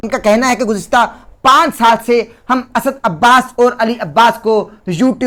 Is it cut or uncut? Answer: uncut